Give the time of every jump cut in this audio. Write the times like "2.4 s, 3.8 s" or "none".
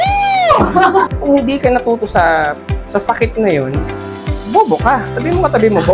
1.2 s

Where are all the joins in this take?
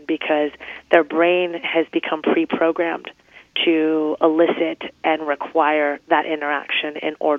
none

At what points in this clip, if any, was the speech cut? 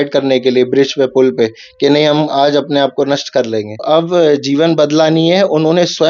3.8 s

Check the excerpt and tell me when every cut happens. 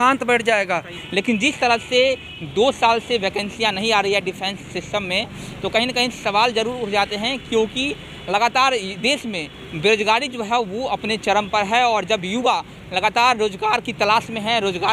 1.0 s

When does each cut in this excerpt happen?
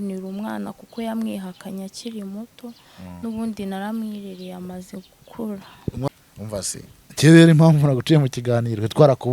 6.1 s

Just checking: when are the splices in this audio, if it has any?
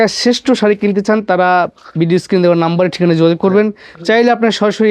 none

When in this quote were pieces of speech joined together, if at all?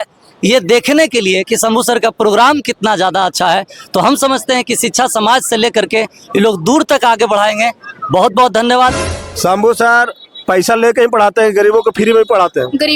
9.1 s

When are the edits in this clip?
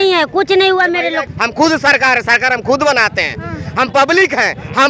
1.2 s

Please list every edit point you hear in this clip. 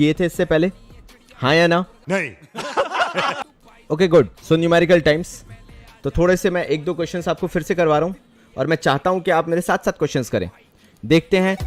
none

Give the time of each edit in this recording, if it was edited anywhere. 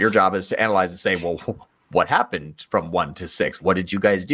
none

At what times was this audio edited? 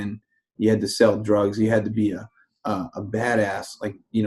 none

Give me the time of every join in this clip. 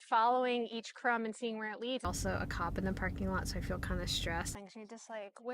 2.0 s, 4.5 s

